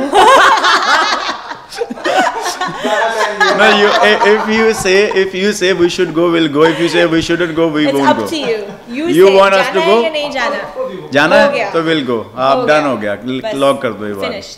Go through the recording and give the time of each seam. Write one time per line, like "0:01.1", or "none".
none

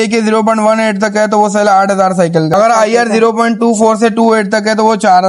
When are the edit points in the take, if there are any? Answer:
0:02.5

